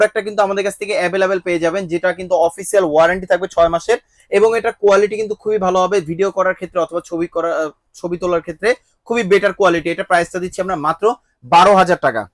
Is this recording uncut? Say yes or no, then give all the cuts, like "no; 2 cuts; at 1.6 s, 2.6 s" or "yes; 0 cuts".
yes; 0 cuts